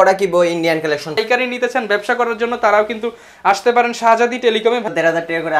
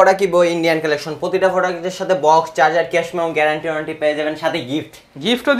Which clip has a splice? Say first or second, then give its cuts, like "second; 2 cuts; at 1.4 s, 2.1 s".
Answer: first; 2 cuts; at 1.2 s, 4.9 s